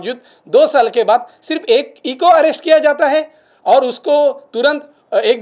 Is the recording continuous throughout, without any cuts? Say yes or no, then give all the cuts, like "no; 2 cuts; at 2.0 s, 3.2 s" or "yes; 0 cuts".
yes; 0 cuts